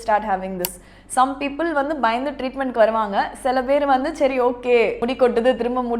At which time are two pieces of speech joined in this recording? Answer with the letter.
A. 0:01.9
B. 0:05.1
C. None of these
B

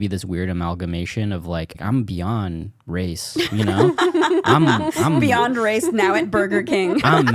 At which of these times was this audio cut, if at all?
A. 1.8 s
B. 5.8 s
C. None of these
A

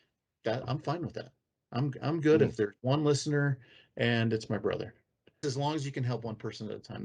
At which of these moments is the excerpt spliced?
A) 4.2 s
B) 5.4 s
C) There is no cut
B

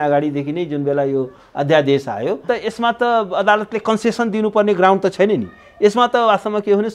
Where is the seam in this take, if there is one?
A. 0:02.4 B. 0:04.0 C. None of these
A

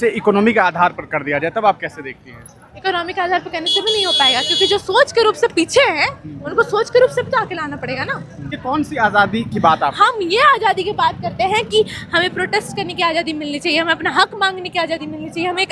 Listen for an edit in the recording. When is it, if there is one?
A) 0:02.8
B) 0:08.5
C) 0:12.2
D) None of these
B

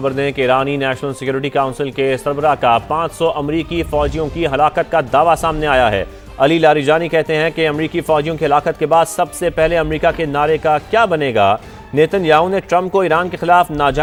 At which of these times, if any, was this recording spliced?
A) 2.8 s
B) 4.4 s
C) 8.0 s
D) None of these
D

